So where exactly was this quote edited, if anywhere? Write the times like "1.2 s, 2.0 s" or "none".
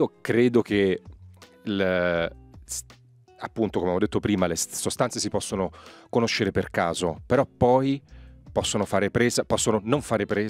none